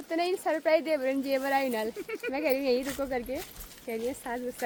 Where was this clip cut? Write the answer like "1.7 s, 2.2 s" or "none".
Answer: none